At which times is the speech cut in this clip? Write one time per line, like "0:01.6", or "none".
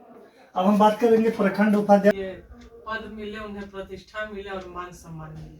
0:02.1